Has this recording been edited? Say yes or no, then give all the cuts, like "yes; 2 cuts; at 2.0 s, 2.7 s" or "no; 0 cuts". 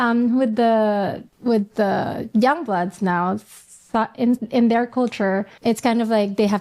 yes; 2 cuts; at 1.3 s, 5.5 s